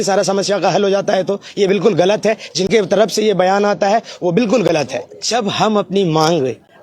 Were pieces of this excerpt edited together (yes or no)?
yes